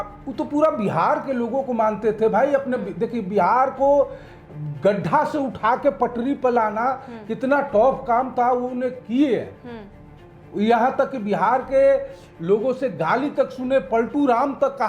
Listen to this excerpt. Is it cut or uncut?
uncut